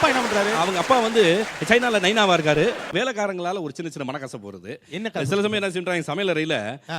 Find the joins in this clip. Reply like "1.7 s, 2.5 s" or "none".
2.9 s